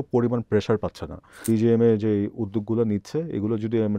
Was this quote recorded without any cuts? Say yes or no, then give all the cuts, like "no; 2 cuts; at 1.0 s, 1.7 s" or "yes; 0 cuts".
no; 1 cut; at 1.4 s